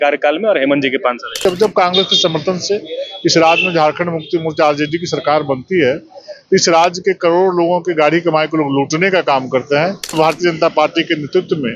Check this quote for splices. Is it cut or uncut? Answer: cut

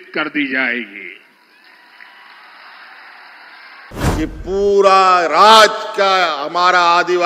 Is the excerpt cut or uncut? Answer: cut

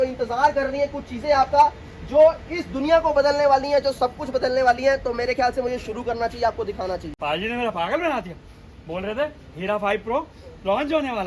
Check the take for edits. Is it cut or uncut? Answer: uncut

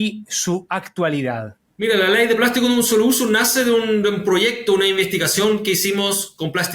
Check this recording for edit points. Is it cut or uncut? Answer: cut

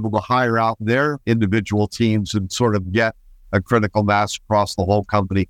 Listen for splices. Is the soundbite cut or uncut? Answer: cut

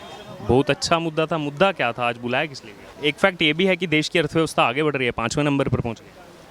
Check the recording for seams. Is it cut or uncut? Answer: cut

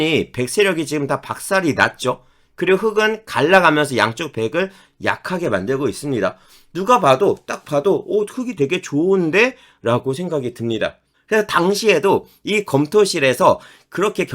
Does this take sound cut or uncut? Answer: cut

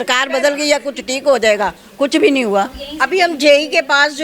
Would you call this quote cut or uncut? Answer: uncut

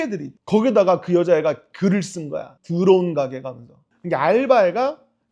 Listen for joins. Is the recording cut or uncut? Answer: cut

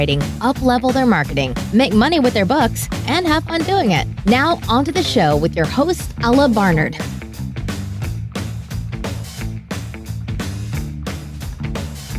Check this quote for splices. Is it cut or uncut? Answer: uncut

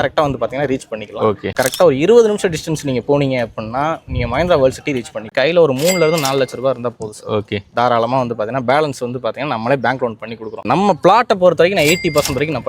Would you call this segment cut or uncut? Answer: cut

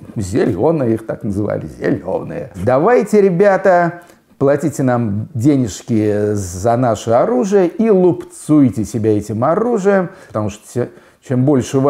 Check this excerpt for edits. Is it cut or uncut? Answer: cut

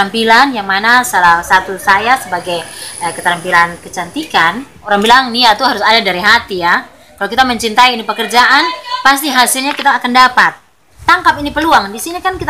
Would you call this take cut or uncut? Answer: cut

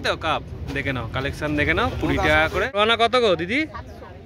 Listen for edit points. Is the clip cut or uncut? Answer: cut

